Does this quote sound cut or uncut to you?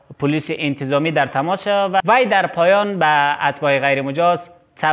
cut